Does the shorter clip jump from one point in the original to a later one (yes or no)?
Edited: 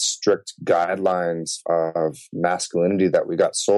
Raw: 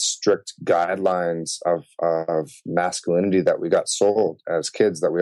yes